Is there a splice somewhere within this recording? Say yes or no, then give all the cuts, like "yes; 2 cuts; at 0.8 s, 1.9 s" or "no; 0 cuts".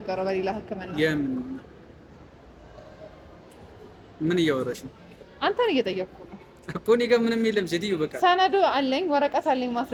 no; 0 cuts